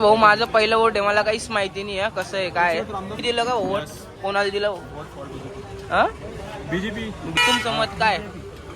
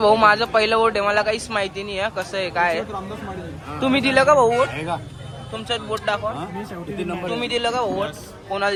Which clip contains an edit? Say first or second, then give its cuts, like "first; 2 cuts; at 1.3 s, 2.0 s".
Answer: first; 2 cuts; at 3.2 s, 7.4 s